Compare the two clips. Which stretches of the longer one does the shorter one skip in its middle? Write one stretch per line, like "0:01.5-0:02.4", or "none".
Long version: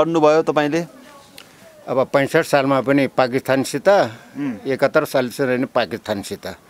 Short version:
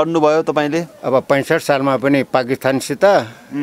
0:00.9-0:01.8